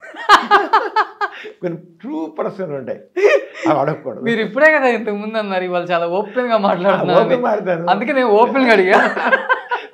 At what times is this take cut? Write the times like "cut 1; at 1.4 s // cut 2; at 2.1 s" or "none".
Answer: none